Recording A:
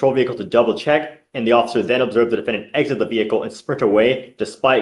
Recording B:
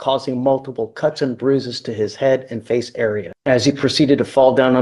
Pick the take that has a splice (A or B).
B